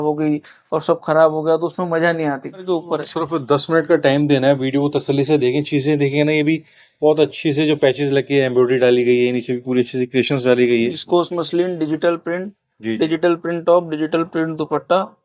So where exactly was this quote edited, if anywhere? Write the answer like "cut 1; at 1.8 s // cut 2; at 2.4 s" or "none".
cut 1; at 2.6 s // cut 2; at 11.0 s